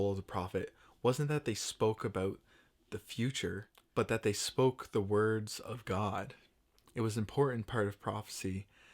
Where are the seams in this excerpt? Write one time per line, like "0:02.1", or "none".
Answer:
0:03.7

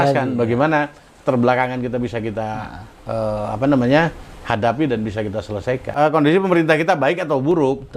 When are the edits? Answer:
0:05.9

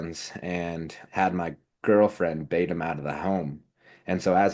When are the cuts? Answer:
0:01.0

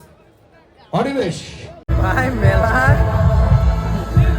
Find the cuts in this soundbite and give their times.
0:01.9

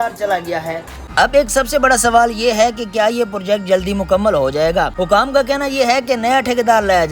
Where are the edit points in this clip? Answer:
0:00.9
0:05.0

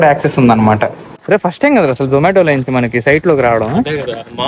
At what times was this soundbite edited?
0:01.1

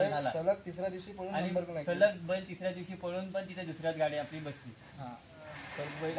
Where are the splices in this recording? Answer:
none

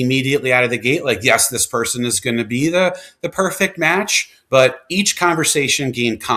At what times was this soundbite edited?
none

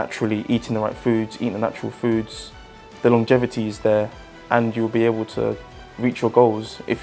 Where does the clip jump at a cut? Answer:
none

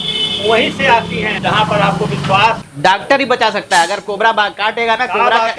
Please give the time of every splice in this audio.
0:01.4
0:02.7

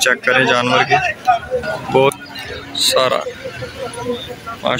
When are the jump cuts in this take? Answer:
0:02.1

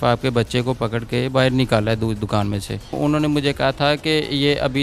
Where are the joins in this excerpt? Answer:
0:03.0

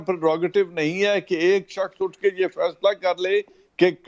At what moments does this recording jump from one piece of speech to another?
none

